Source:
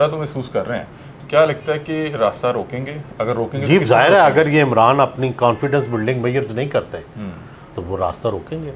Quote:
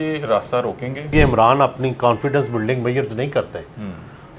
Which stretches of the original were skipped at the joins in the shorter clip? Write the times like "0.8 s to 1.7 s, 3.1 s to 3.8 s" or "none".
3.0 s to 4.5 s